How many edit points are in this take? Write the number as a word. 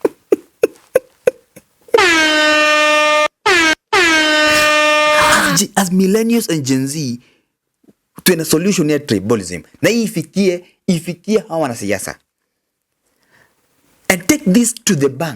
one